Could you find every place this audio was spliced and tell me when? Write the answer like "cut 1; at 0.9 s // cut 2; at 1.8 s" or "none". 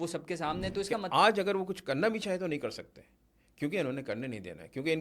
cut 1; at 1.0 s